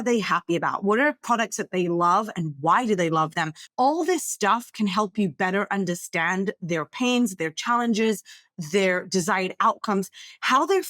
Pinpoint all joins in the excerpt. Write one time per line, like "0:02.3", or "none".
0:03.5